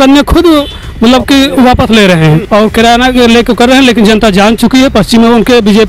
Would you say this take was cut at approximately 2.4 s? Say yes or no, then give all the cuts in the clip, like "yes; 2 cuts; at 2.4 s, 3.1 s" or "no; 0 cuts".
yes; 1 cut; at 2.4 s